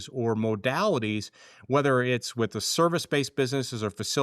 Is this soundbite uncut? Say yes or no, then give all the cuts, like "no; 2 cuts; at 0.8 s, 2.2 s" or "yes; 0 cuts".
yes; 0 cuts